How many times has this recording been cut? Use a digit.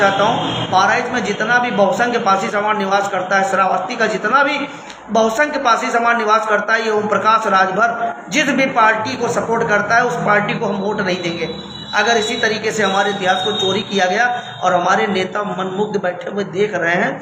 0